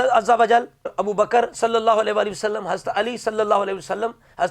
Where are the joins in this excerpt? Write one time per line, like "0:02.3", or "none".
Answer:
0:00.9